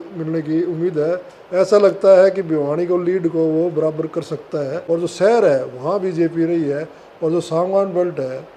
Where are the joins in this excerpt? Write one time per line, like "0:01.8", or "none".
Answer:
0:04.8